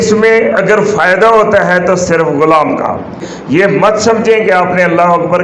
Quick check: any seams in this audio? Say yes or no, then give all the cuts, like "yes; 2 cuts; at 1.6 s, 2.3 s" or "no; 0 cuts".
yes; 1 cut; at 3.3 s